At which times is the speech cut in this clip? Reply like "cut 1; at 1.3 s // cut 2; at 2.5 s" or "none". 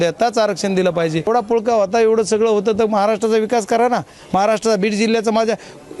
cut 1; at 1.3 s